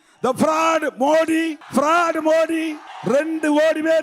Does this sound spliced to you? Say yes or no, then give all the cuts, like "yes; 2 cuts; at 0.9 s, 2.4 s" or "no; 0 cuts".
yes; 2 cuts; at 1.6 s, 2.9 s